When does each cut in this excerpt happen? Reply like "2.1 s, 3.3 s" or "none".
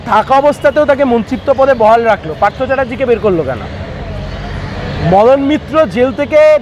none